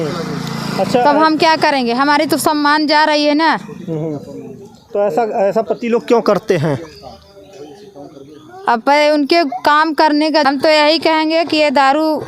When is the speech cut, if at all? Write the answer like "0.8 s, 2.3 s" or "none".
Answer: 10.5 s